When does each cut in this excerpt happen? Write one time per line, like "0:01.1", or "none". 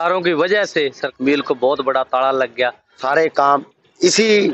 0:01.0
0:03.0